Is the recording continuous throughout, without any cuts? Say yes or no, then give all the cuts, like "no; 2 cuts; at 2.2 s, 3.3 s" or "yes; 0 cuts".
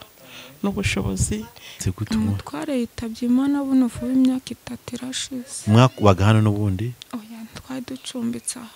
no; 1 cut; at 1.8 s